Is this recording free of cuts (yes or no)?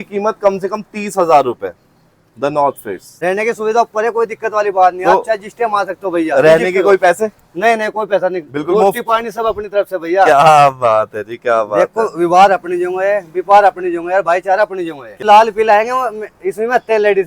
no